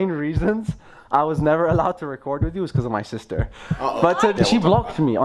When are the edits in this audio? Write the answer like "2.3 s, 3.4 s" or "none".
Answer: 4.3 s